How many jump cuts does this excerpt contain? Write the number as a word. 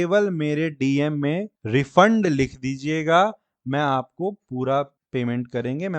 two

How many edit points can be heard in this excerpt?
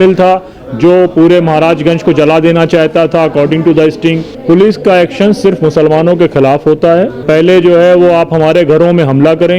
two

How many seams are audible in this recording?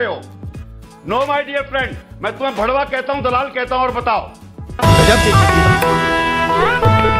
zero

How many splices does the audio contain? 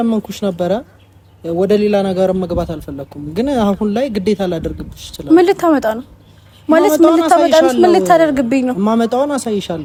zero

